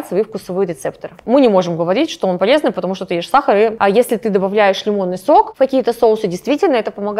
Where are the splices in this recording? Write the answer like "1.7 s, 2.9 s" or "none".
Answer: 1.1 s, 3.7 s, 5.5 s